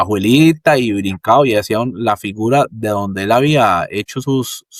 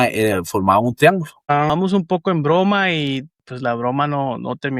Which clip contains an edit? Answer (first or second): second